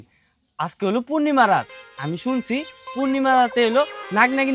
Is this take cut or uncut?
uncut